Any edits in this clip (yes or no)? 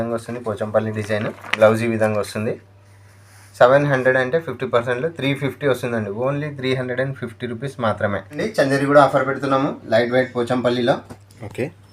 yes